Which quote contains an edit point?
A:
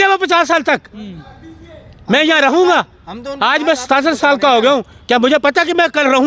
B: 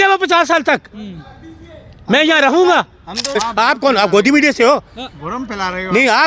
B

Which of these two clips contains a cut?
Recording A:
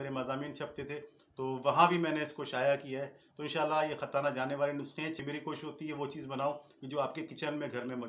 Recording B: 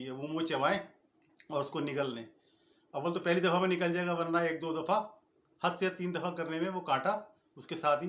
A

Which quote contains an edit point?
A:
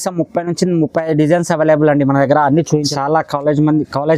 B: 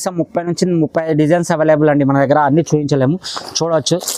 A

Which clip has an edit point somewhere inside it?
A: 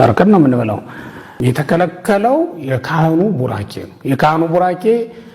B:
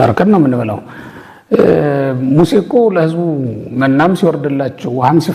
A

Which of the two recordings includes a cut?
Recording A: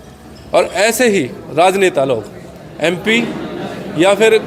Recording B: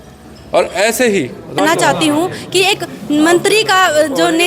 B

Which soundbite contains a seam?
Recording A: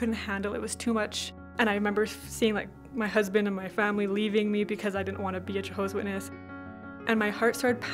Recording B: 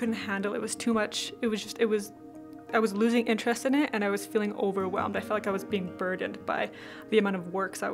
A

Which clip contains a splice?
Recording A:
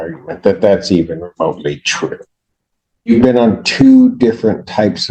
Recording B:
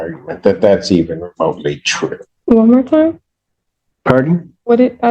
B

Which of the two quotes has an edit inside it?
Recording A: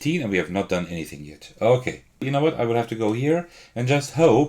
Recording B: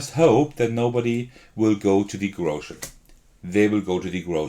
A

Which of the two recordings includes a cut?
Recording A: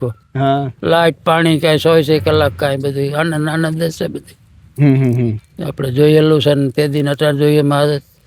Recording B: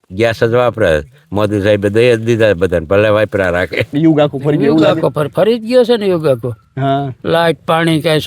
B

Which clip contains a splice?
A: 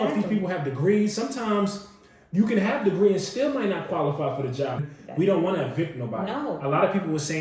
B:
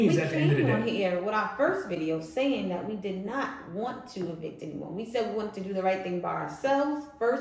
A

